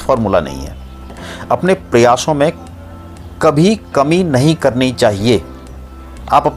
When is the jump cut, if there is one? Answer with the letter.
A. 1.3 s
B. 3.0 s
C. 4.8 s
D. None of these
A